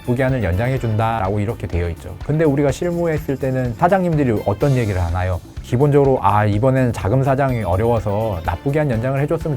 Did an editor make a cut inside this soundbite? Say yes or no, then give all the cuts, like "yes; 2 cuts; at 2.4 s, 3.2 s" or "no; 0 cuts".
yes; 2 cuts; at 1.2 s, 3.7 s